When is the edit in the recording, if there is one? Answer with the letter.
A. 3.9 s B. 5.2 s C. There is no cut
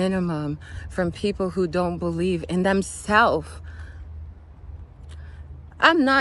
C